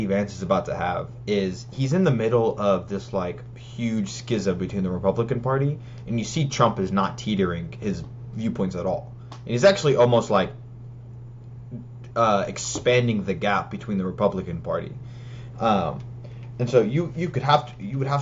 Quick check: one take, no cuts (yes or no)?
yes